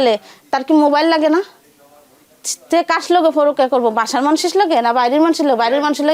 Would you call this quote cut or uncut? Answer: uncut